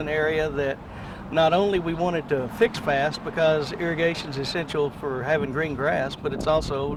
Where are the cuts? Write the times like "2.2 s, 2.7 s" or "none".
none